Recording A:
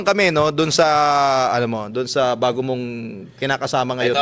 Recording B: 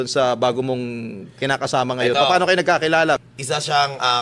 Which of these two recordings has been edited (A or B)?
B